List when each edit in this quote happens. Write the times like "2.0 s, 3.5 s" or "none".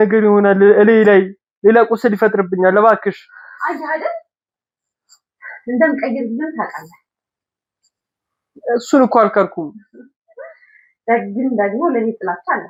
none